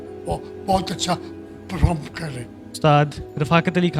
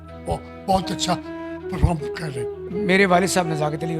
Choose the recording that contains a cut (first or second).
second